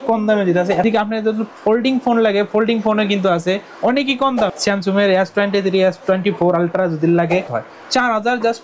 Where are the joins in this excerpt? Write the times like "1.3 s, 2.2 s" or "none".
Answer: 0.8 s, 4.5 s, 7.6 s